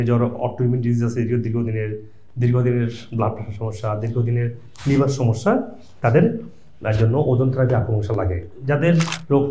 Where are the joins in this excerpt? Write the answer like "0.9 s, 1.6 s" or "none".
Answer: none